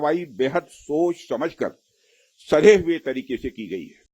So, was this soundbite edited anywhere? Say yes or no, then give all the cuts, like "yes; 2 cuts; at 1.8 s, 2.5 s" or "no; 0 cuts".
no; 0 cuts